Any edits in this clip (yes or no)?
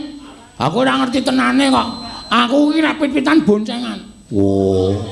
no